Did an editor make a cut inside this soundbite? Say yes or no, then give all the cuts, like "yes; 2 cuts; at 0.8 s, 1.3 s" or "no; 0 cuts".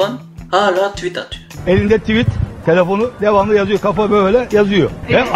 no; 0 cuts